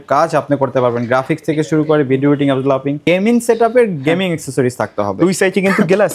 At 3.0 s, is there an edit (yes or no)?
yes